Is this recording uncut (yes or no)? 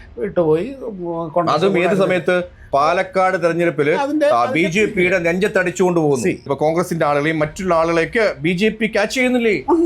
no